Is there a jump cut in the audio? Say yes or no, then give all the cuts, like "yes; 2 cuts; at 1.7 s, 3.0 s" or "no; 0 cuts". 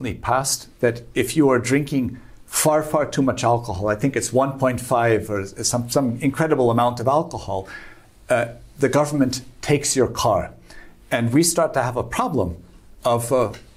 no; 0 cuts